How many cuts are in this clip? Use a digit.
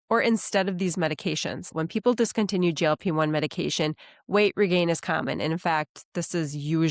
1